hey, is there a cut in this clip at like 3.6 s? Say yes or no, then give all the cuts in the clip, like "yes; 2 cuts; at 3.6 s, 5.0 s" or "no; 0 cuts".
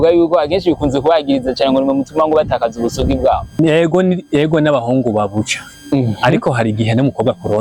yes; 1 cut; at 3.6 s